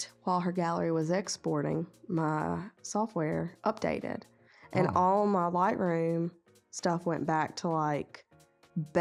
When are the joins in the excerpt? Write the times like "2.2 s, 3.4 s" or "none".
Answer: none